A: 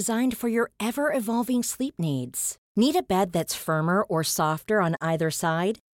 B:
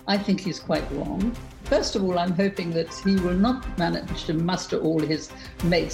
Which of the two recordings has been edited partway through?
B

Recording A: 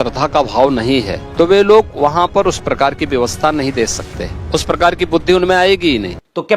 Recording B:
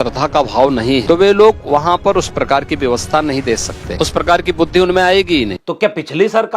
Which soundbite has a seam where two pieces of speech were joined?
B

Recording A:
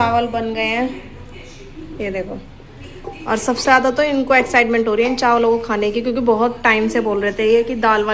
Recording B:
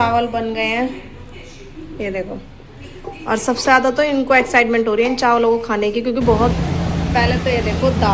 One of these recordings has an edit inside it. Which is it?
B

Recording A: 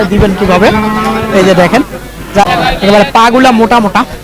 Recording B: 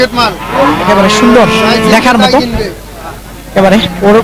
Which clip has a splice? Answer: A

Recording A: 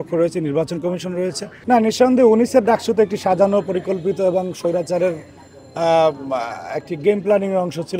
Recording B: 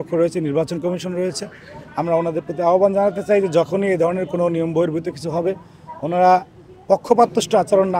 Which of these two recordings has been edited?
A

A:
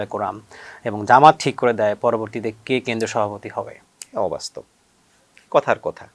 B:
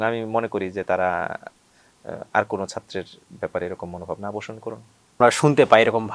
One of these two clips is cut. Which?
B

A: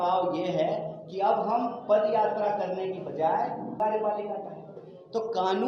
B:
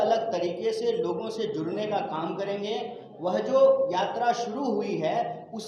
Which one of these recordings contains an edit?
A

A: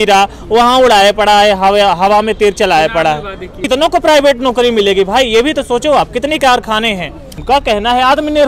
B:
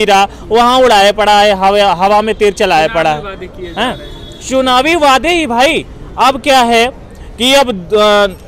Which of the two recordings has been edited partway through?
A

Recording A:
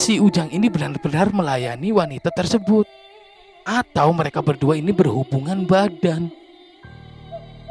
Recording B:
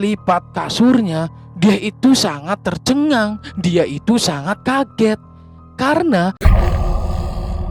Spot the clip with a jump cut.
B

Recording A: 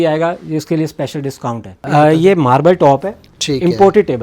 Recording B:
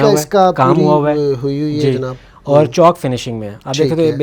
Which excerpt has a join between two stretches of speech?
A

